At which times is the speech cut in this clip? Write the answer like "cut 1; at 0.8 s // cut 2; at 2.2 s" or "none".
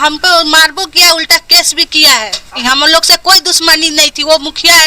cut 1; at 2.6 s